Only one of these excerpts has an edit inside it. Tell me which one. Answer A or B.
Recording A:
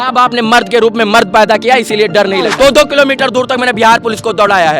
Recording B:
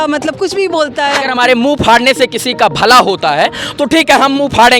A